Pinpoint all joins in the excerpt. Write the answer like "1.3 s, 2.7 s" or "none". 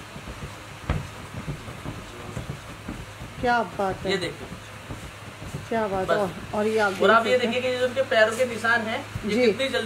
none